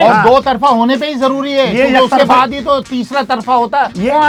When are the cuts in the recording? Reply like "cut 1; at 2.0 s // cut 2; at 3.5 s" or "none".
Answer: none